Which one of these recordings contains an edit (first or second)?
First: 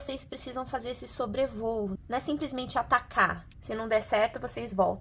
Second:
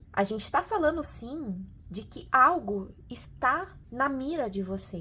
first